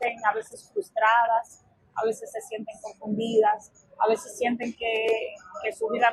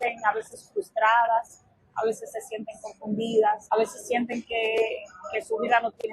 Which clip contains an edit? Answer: second; 1 cut; at 3.6 s

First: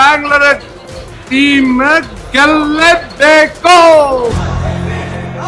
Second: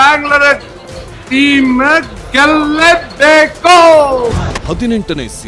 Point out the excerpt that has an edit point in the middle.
second; 1 cut; at 4.5 s

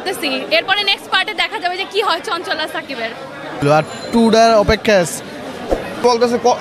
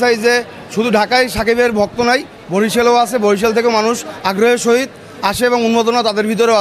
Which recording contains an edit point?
first; 2 cuts; at 3.6 s, 5.9 s

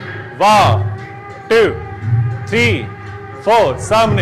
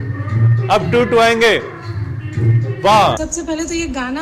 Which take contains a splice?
second; 1 cut; at 3.2 s

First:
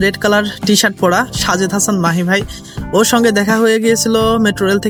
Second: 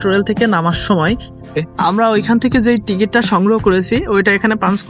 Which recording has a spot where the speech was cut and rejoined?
second; 1 cut; at 1.5 s

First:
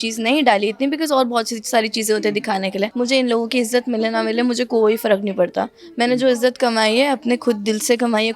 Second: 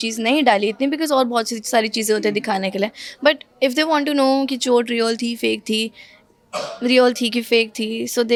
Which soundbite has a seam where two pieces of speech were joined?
first; 1 cut; at 2.9 s

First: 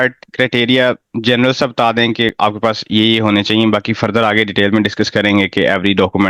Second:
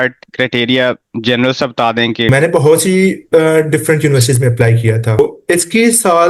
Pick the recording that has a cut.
second; 2 cuts; at 2.3 s, 5.2 s

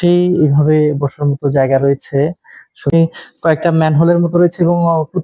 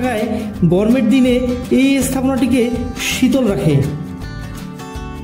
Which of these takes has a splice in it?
first; 1 cut; at 2.9 s

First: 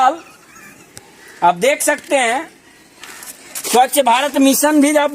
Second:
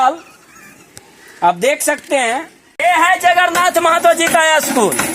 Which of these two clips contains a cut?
second; 1 cut; at 2.6 s

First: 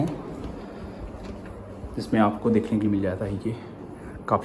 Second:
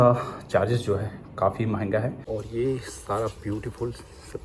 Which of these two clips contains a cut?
second; 1 cut; at 2.2 s

